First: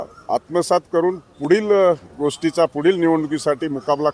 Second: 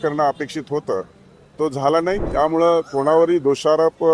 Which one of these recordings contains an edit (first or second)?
second